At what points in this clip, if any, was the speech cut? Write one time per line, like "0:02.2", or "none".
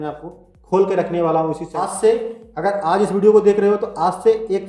0:01.6